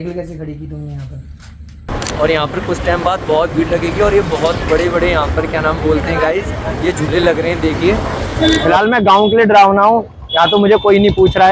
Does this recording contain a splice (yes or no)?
yes